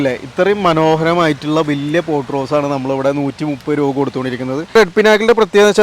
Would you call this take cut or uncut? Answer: cut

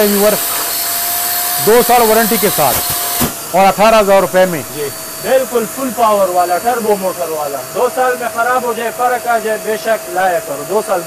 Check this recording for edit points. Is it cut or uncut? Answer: uncut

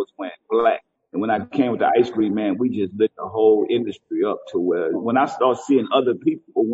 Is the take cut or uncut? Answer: cut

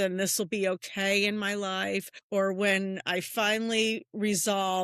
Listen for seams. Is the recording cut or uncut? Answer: cut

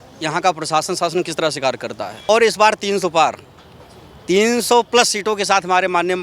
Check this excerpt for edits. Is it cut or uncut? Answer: cut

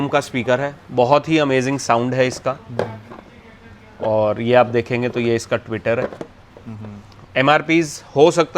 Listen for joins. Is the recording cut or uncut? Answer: uncut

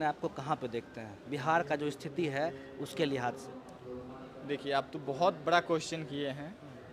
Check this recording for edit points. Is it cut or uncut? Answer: cut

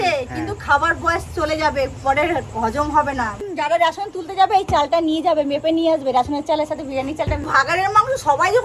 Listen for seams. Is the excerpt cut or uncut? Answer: cut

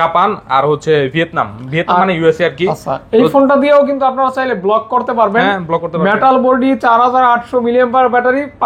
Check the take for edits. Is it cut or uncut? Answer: uncut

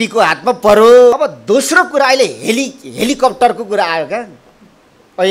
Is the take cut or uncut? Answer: cut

